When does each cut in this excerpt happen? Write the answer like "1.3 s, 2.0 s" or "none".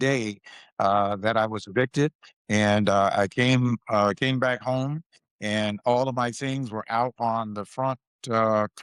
none